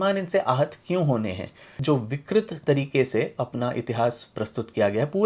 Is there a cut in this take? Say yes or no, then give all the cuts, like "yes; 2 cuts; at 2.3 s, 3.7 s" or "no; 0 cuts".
yes; 1 cut; at 1.7 s